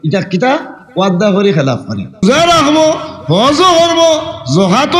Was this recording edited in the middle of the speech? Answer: yes; 1 cut; at 2.2 s

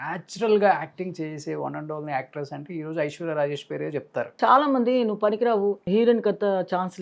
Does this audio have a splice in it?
yes; 2 cuts; at 4.3 s, 5.8 s

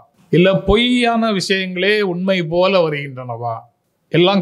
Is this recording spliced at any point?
no; 0 cuts

